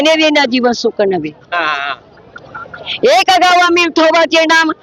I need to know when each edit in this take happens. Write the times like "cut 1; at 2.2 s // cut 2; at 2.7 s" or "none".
none